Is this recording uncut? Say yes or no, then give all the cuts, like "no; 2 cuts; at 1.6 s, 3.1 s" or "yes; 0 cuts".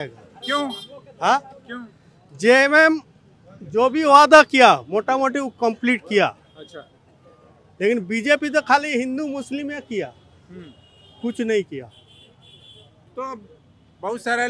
yes; 0 cuts